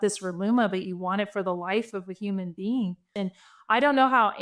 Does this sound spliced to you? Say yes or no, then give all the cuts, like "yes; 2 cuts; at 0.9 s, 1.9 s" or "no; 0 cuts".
yes; 1 cut; at 3.1 s